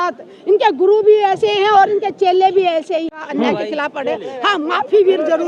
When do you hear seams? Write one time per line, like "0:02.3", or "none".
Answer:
0:03.2